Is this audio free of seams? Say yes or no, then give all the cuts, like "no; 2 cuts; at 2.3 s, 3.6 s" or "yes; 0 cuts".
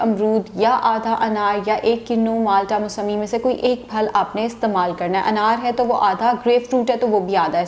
yes; 0 cuts